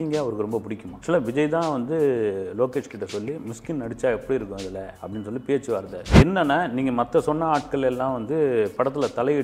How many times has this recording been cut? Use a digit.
2